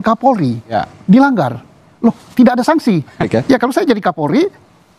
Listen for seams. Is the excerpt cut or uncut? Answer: cut